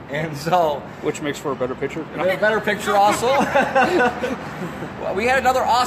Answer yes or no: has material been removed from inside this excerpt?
no